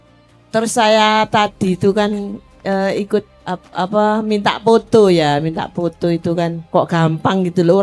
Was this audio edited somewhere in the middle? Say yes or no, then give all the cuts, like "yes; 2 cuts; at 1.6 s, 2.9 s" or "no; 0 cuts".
yes; 2 cuts; at 3.4 s, 6.6 s